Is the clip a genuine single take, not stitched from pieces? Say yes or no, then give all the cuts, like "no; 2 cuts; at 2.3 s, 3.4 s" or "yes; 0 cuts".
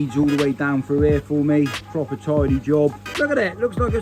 no; 1 cut; at 3.1 s